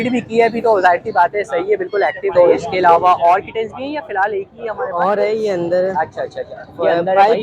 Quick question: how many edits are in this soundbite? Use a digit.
1